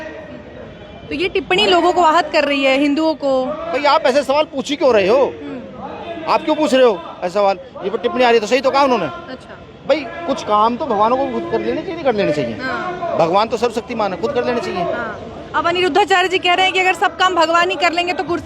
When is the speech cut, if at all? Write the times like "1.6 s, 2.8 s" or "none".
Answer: 3.7 s